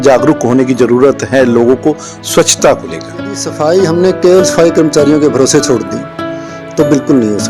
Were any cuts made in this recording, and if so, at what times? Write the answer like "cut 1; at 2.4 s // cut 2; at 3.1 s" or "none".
cut 1; at 3.5 s